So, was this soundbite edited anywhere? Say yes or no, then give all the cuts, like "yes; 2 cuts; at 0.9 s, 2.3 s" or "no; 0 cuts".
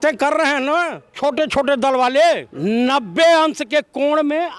yes; 2 cuts; at 1.0 s, 2.5 s